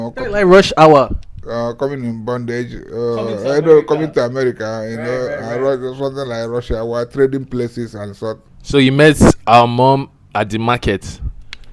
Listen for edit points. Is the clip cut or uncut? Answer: cut